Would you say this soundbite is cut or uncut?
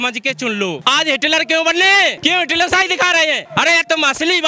cut